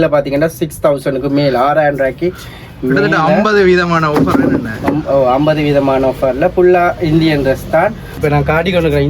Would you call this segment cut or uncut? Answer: cut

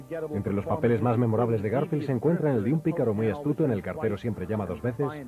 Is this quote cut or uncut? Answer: uncut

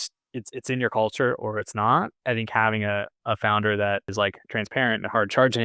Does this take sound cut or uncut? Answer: cut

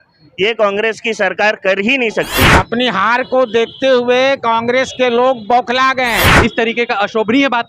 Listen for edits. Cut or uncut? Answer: cut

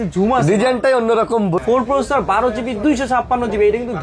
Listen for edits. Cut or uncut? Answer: cut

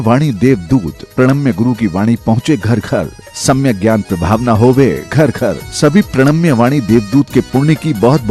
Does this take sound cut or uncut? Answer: uncut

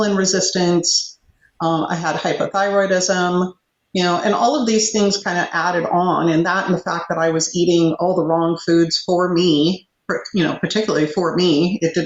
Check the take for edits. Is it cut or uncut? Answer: uncut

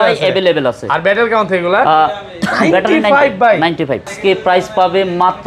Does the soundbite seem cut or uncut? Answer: cut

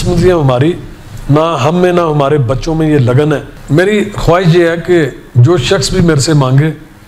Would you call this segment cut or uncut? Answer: cut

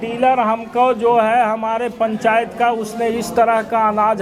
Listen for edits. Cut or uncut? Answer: uncut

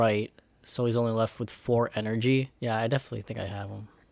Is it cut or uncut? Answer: cut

